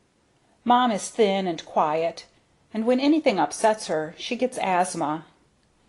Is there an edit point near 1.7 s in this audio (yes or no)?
yes